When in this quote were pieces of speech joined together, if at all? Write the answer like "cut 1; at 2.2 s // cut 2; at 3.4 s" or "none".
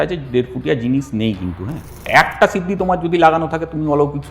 cut 1; at 2.1 s